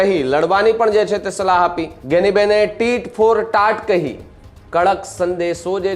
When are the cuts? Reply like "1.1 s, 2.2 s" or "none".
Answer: 1.9 s